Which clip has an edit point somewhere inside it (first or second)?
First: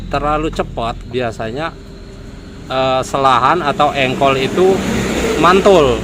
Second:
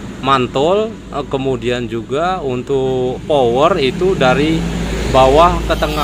first